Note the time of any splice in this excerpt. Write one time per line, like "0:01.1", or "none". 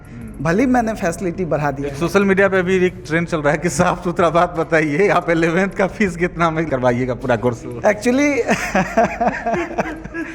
0:06.7